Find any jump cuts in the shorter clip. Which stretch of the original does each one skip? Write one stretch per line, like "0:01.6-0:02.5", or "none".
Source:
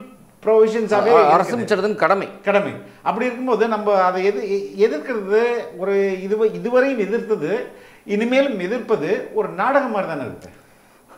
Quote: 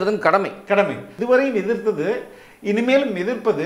0:02.9-0:06.6